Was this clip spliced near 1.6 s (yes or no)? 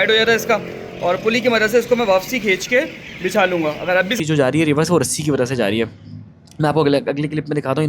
no